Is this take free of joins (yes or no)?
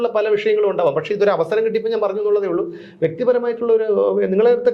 yes